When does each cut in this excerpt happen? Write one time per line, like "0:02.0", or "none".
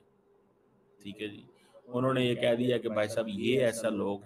none